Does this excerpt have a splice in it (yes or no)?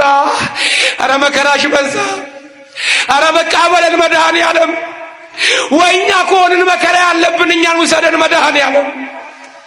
no